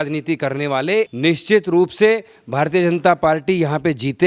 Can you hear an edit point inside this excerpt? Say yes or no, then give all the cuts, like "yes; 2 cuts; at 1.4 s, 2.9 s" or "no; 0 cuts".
yes; 1 cut; at 1.1 s